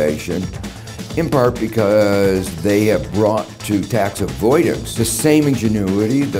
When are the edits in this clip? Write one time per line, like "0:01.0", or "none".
0:04.9